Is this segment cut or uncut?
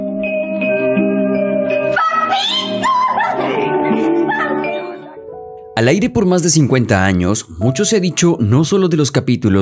uncut